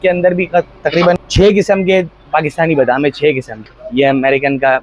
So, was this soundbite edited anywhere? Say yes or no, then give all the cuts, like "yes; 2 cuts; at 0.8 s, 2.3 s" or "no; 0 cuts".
yes; 2 cuts; at 1.2 s, 3.6 s